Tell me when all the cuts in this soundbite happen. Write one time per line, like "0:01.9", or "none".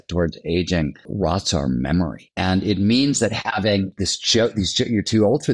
0:01.1
0:02.2
0:03.9